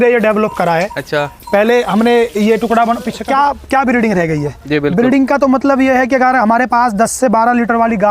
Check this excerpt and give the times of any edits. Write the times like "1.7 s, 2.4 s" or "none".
3.2 s